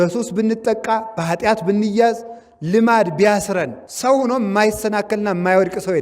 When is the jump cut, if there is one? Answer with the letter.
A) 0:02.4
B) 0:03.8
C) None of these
B